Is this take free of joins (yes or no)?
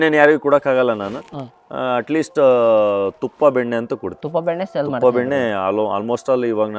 yes